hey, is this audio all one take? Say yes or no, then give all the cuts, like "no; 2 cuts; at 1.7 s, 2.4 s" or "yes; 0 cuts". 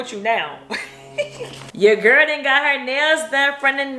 no; 1 cut; at 1.6 s